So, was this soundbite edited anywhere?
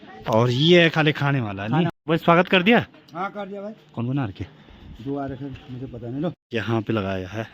yes; 2 cuts; at 1.9 s, 6.4 s

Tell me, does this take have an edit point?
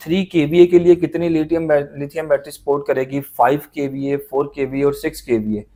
no; 0 cuts

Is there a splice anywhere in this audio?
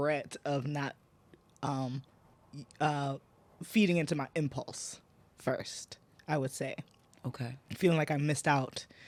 no; 0 cuts

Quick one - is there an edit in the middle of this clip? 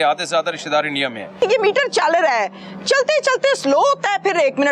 yes; 1 cut; at 1.4 s

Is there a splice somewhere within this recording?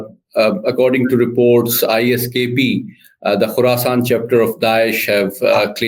no; 0 cuts

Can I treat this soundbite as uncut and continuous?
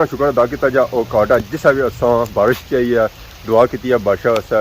yes; 0 cuts

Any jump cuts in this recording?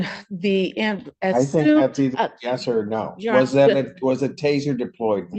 no; 0 cuts

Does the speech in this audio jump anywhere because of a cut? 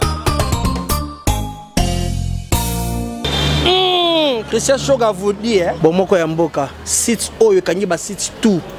no; 0 cuts

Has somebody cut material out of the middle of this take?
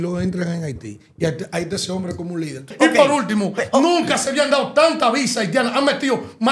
yes; 1 cut; at 2.7 s

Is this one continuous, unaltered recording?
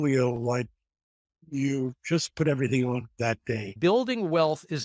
no; 1 cut; at 3.7 s

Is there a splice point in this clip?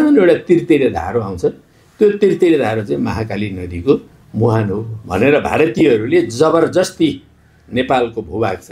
no; 0 cuts

